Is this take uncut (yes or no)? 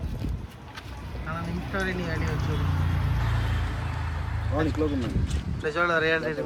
yes